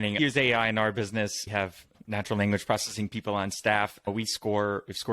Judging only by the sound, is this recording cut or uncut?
cut